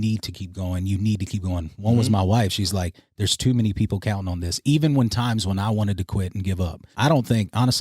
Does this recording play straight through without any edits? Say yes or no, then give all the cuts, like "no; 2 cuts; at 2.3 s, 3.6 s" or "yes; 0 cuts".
no; 1 cut; at 6.8 s